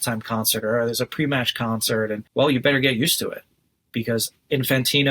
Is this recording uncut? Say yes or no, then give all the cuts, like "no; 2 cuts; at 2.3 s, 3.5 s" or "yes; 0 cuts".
no; 1 cut; at 2.2 s